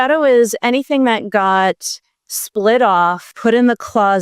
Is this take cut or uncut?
cut